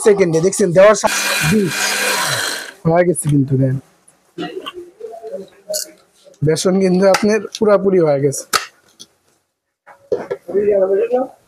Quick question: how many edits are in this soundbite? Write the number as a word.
one